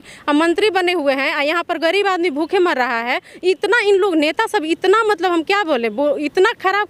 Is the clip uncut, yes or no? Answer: yes